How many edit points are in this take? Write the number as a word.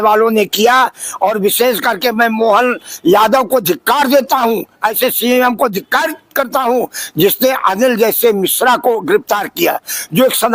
zero